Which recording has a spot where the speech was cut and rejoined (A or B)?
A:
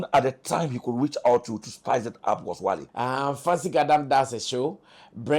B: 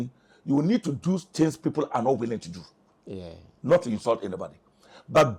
A